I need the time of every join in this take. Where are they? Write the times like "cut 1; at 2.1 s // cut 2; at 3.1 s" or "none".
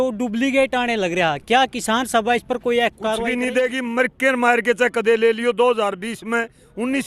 cut 1; at 3.3 s